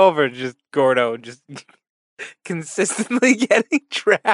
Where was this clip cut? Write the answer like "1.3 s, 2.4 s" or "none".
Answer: none